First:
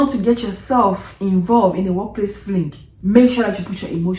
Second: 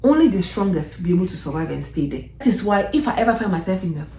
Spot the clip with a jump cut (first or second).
second